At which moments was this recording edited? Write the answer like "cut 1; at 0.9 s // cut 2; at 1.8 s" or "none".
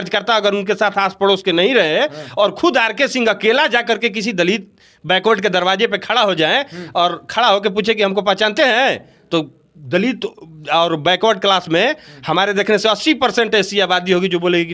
none

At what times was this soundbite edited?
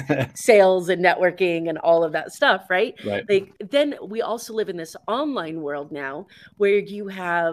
cut 1; at 3.6 s

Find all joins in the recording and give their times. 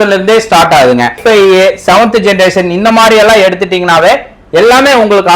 cut 1; at 1.2 s

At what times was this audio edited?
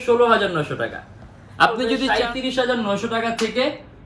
cut 1; at 2.0 s

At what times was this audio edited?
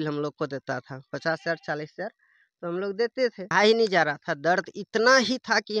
cut 1; at 3.5 s

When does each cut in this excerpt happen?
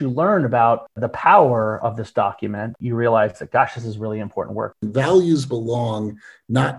cut 1; at 1.1 s // cut 2; at 2.7 s // cut 3; at 4.8 s

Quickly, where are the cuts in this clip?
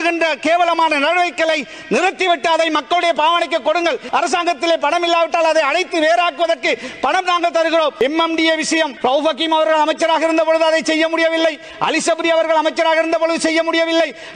cut 1; at 4.0 s // cut 2; at 7.9 s // cut 3; at 8.9 s

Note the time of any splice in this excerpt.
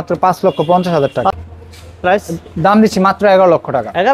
cut 1; at 1.4 s

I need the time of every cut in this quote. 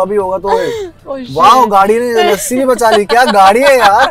none

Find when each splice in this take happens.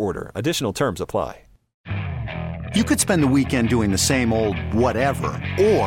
cut 1; at 1.7 s

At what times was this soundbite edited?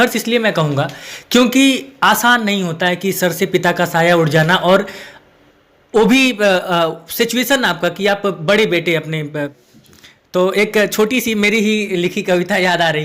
cut 1; at 9.5 s

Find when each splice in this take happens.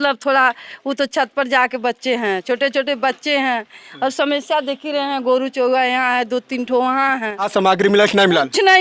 cut 1; at 7.5 s

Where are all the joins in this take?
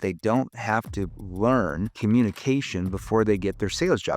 cut 1; at 1.9 s

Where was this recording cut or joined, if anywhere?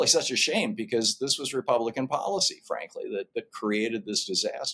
none

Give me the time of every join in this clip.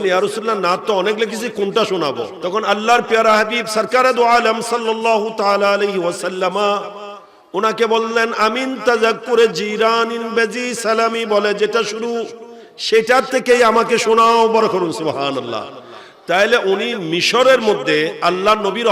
cut 1; at 2.3 s

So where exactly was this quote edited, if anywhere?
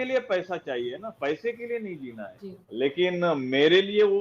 cut 1; at 2.6 s

